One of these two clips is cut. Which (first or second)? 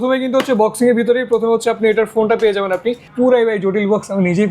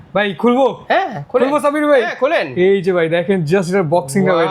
first